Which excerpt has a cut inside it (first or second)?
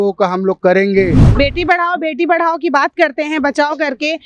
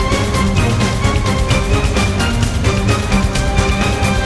first